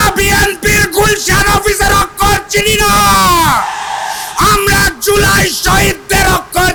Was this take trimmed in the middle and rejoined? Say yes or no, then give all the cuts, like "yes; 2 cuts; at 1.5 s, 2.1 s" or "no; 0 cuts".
no; 0 cuts